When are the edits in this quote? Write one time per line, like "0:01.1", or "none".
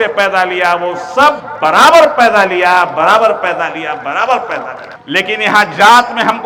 none